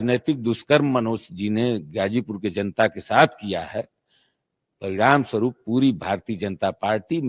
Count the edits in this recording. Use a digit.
0